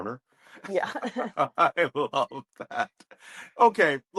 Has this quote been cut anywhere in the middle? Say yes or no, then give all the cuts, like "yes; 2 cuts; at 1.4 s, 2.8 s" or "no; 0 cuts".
no; 0 cuts